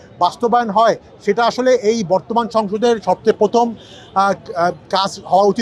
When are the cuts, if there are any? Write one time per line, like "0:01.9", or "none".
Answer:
none